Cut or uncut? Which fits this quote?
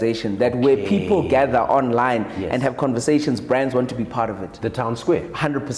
uncut